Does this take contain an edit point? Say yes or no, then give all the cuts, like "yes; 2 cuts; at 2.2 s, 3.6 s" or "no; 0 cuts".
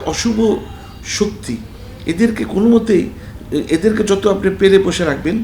no; 0 cuts